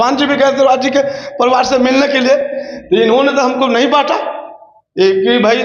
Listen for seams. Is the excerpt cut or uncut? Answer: uncut